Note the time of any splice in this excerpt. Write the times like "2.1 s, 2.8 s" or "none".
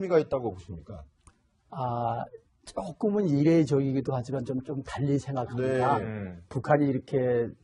1.2 s